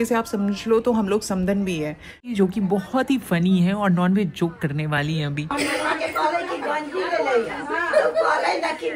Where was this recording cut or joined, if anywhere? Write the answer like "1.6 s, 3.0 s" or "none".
2.3 s